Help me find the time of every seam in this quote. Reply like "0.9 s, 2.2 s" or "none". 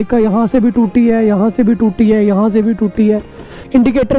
none